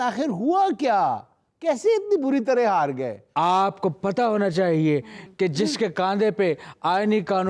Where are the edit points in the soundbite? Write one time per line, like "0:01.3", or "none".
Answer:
0:03.2